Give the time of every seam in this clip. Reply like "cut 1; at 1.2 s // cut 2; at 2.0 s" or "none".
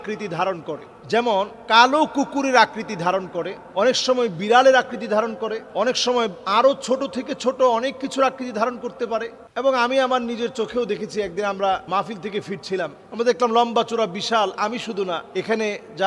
cut 1; at 9.4 s